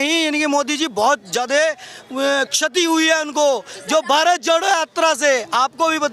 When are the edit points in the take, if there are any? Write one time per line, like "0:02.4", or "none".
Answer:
none